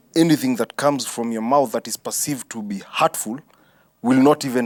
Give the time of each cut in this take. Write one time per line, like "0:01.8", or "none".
none